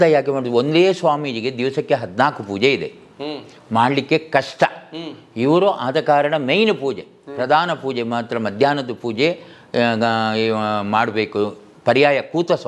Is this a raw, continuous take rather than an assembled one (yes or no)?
yes